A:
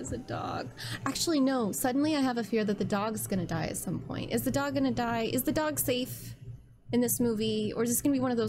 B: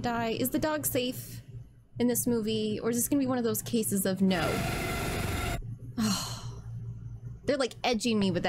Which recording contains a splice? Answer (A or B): B